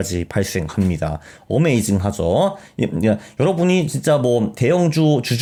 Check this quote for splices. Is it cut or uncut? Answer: uncut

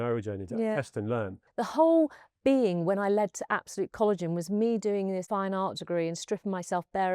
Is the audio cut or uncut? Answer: cut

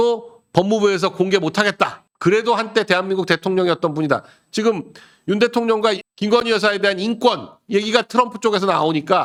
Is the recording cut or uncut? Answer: uncut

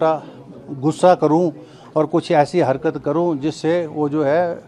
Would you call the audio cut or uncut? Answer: uncut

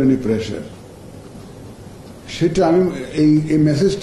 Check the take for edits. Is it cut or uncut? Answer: uncut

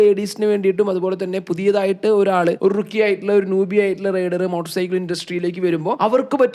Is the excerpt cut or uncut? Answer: uncut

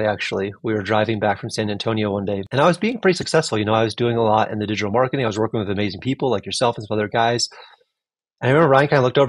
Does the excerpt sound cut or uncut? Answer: cut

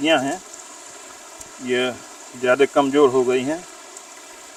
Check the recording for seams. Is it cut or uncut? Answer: uncut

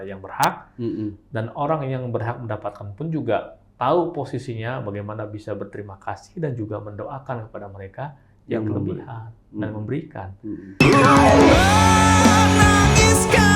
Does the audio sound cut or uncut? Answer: cut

